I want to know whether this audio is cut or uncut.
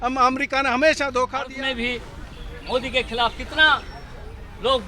cut